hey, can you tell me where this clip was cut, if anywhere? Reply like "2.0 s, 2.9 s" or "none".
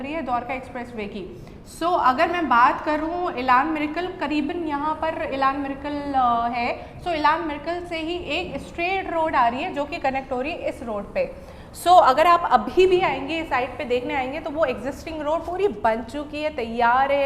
none